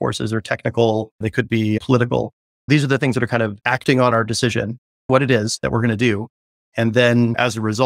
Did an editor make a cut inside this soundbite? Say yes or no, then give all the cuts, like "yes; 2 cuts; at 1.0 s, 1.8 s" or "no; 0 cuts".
no; 0 cuts